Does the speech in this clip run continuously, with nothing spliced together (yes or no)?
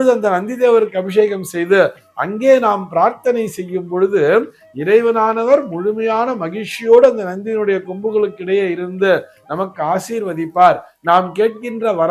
yes